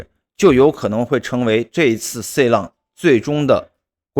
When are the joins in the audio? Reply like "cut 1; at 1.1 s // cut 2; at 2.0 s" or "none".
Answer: none